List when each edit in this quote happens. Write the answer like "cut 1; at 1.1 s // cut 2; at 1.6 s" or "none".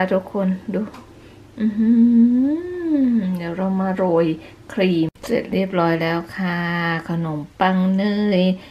cut 1; at 5.2 s